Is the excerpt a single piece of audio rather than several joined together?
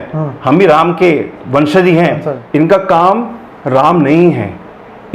no; 1 cut; at 2.3 s

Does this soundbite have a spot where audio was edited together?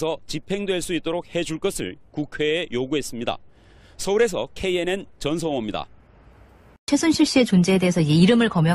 yes; 1 cut; at 7.5 s

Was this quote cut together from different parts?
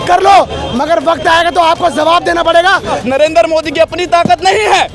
yes; 1 cut; at 3.0 s

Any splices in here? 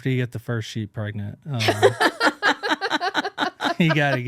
no; 0 cuts

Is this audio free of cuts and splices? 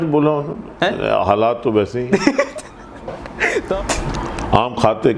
no; 1 cut; at 3.8 s

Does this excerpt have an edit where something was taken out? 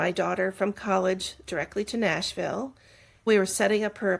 yes; 1 cut; at 3.2 s

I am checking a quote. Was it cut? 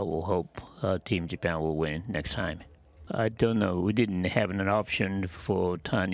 yes; 1 cut; at 2.9 s

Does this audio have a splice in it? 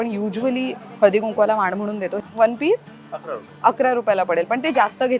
yes; 1 cut; at 2.1 s

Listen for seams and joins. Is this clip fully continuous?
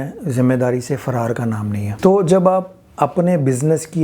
no; 1 cut; at 1.9 s

